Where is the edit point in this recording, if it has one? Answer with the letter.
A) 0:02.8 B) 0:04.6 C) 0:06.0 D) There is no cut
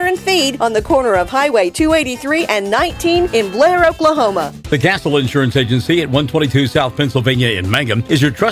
B